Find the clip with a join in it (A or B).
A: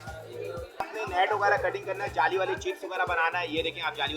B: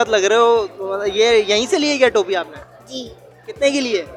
A